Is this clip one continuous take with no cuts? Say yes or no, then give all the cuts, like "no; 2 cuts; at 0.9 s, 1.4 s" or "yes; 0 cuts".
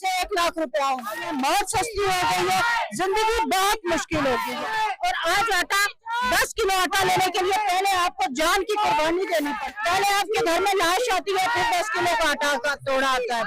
no; 3 cuts; at 1.3 s, 4.6 s, 9.7 s